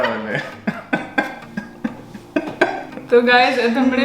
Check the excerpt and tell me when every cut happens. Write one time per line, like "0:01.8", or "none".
0:02.8